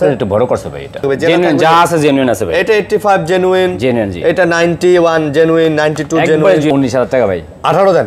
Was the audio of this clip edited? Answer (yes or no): yes